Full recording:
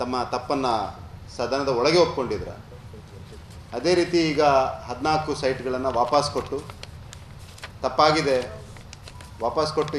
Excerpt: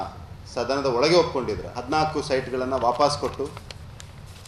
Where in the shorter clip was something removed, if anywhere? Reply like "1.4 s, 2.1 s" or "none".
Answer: 1.7 s